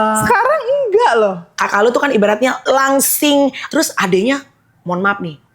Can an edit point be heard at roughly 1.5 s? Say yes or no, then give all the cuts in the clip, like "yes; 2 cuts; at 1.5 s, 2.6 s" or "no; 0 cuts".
yes; 3 cuts; at 1.5 s, 2.6 s, 3.6 s